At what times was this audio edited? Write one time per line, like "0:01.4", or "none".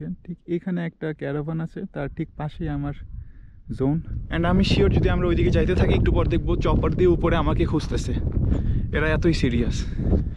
0:04.2